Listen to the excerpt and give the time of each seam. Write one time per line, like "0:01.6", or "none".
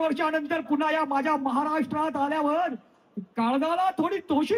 none